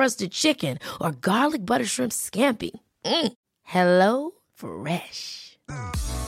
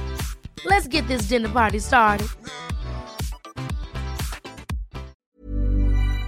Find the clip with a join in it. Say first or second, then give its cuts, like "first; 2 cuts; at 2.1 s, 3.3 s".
second; 1 cut; at 5.3 s